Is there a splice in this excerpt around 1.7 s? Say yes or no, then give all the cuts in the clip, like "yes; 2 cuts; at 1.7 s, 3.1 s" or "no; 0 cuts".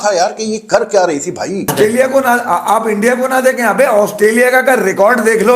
yes; 1 cut; at 1.7 s